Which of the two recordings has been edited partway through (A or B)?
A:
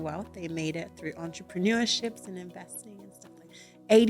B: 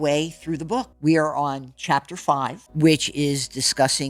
B